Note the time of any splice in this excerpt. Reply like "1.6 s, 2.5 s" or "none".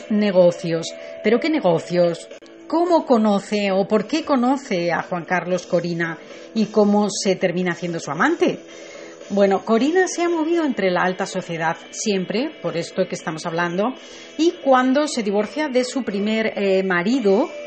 2.5 s